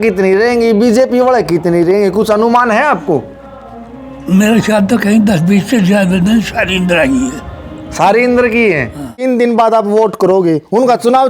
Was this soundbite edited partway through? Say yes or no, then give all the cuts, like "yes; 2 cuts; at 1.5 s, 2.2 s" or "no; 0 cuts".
yes; 1 cut; at 9.2 s